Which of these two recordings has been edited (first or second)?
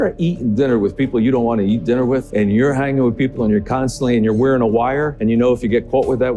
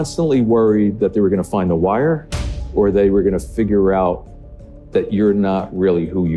first